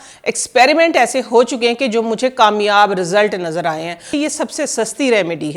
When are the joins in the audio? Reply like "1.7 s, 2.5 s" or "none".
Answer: 4.1 s